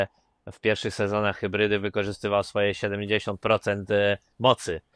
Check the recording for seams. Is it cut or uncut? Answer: uncut